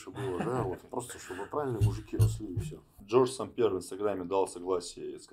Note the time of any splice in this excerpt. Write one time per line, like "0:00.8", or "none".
0:02.8